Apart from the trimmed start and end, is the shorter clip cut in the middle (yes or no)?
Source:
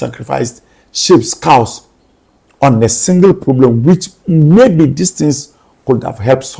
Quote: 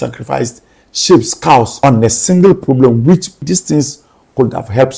yes